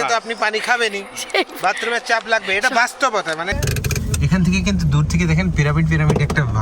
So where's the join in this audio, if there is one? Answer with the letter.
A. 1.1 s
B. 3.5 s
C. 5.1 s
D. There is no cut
B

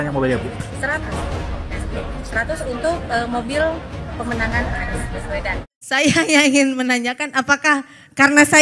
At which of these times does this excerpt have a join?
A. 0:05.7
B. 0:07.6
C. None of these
A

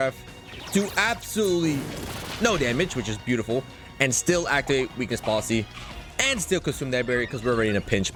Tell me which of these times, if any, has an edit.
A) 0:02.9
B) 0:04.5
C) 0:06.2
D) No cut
D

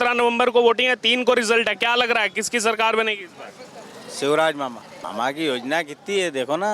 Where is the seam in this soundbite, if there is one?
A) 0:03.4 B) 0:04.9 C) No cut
B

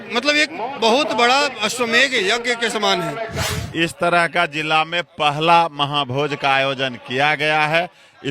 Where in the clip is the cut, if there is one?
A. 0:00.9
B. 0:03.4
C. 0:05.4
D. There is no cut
B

